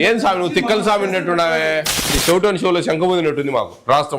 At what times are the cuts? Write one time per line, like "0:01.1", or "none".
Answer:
0:02.1